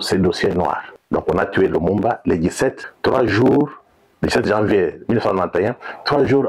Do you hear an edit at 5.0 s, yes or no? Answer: no